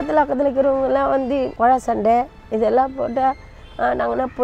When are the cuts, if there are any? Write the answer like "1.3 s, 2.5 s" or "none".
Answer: 1.5 s